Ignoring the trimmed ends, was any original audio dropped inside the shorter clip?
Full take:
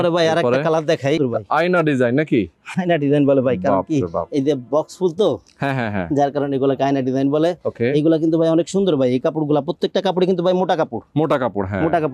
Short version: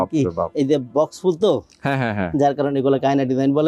no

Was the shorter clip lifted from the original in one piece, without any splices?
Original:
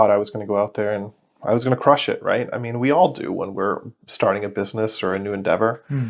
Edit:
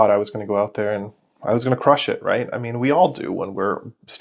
yes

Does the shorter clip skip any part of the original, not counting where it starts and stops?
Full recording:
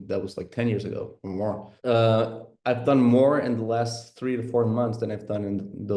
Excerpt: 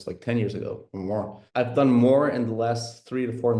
yes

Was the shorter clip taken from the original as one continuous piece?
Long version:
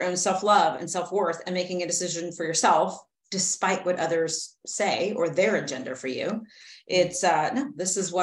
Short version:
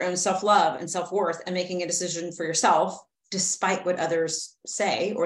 yes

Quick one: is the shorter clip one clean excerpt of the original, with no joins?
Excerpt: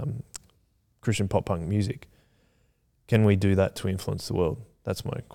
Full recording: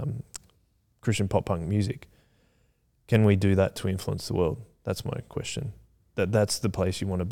yes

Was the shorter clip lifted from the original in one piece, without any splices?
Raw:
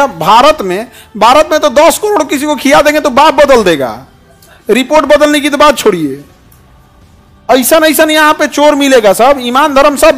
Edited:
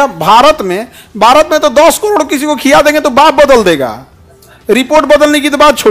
yes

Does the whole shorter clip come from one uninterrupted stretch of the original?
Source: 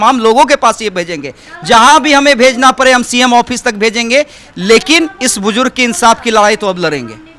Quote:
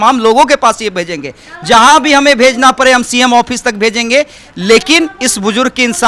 yes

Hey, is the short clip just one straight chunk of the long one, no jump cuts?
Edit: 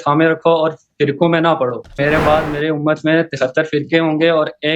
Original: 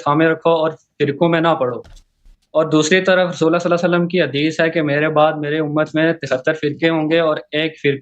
no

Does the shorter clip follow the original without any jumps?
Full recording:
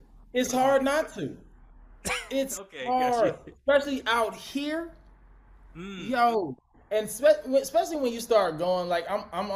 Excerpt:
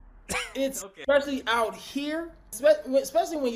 no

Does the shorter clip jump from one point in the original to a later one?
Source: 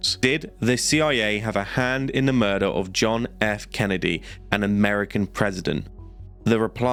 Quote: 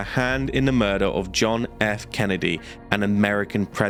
no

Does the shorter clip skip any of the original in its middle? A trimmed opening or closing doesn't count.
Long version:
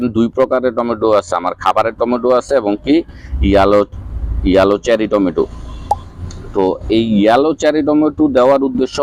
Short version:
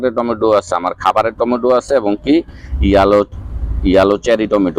no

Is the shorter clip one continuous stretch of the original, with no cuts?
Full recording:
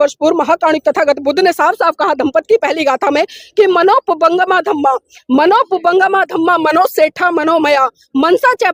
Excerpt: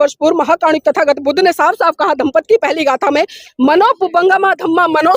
no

